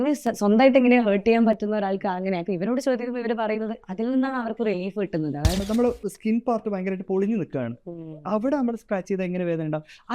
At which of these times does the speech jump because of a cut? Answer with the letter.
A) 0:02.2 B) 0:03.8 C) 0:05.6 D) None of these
C